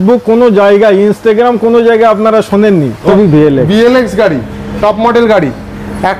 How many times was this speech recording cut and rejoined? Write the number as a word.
one